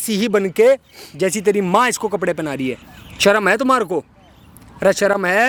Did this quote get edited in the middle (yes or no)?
no